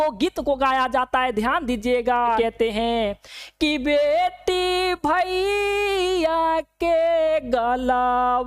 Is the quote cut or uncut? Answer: cut